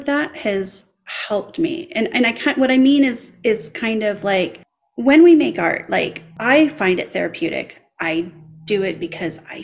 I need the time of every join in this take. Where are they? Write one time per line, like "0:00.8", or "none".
0:06.3